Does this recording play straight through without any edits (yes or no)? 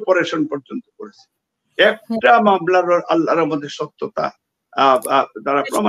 yes